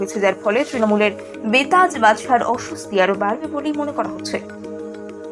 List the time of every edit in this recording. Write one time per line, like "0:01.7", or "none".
0:04.4